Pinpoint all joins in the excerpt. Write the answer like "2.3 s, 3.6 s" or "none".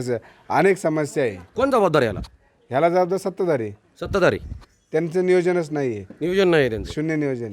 none

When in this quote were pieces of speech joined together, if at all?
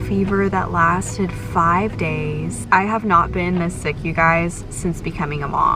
2.6 s

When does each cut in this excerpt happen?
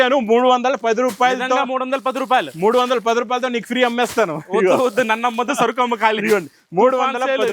none

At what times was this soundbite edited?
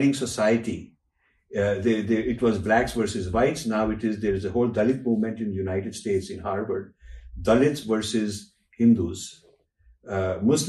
none

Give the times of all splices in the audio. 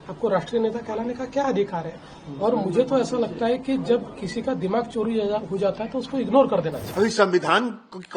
6.8 s

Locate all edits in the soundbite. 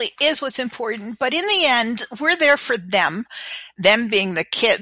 none

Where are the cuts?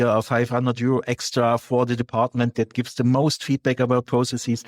none

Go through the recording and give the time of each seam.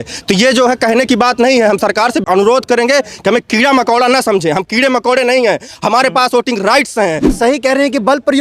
2.2 s, 7.3 s

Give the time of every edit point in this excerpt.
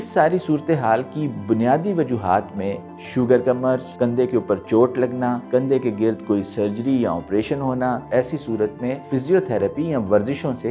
3.9 s, 5.4 s, 8.0 s, 9.0 s

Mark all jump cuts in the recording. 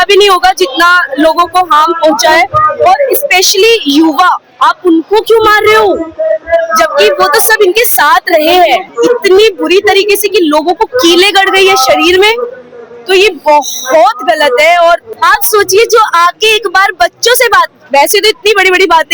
8.9 s, 15.1 s

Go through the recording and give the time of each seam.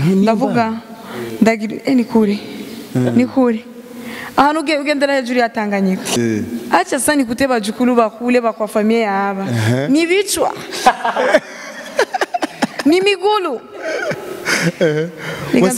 6.2 s

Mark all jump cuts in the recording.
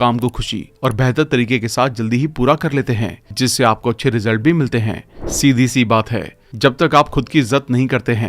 5.1 s

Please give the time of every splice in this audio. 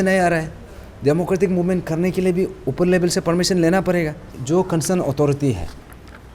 4.3 s

